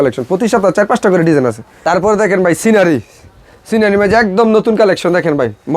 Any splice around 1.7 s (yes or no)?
yes